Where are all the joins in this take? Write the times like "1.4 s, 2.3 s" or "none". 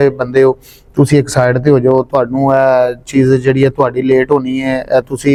none